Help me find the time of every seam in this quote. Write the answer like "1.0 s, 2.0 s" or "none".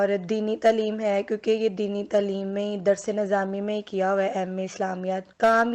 none